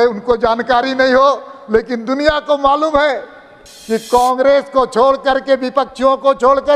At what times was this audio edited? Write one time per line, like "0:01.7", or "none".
none